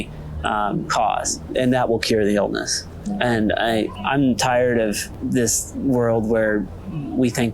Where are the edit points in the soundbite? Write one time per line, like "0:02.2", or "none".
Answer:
0:01.4